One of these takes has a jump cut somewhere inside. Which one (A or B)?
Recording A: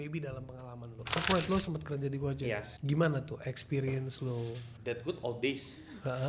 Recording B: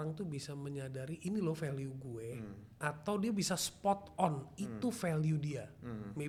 A